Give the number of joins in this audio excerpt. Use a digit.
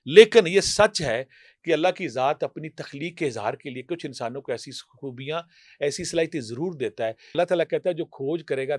1